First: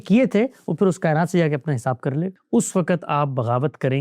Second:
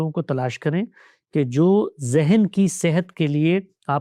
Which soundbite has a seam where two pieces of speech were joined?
first; 1 cut; at 2.4 s

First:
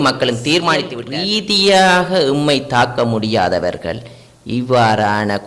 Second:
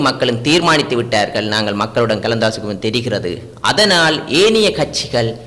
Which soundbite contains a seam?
first; 1 cut; at 1.0 s

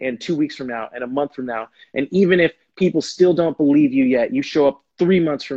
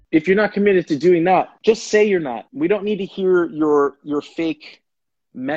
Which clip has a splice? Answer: second; 2 cuts; at 1.5 s, 2.4 s

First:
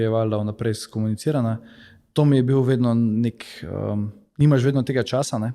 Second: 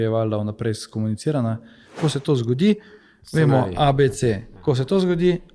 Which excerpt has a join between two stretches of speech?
second; 1 cut; at 2.0 s

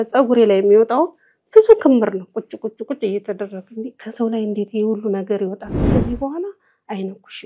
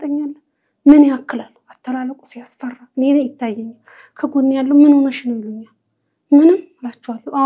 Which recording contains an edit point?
first; 1 cut; at 5.9 s

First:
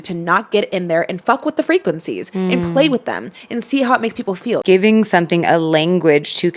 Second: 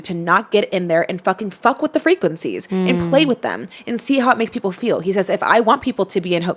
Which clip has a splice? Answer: first; 2 cuts; at 1.2 s, 4.6 s

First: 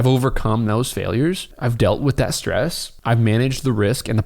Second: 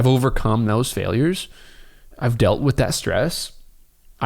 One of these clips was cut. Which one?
first; 2 cuts; at 1.5 s, 2.9 s

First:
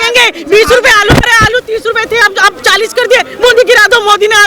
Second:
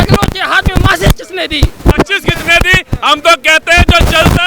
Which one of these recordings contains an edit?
second; 1 cut; at 1.9 s

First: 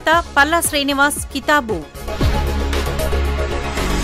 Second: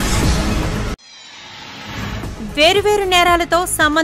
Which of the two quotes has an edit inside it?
second; 1 cut; at 1.0 s

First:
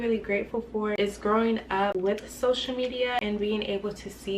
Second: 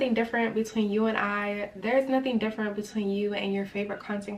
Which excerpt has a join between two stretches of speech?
first; 3 cuts; at 0.9 s, 1.9 s, 3.2 s

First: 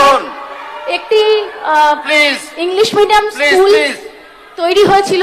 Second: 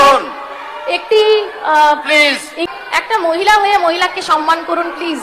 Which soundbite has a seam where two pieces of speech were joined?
second; 1 cut; at 2.7 s

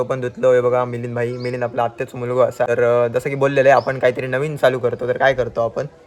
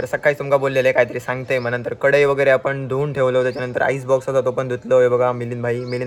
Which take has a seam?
first; 1 cut; at 2.7 s

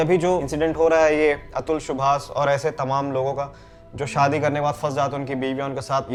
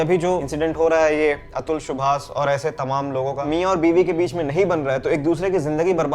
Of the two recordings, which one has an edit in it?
second; 1 cut; at 3.5 s

